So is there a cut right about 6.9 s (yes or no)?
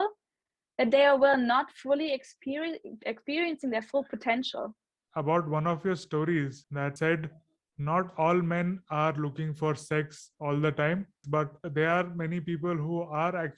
yes